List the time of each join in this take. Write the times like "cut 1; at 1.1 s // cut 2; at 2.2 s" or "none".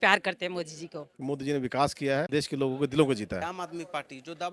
cut 1; at 1.0 s // cut 2; at 2.3 s // cut 3; at 3.4 s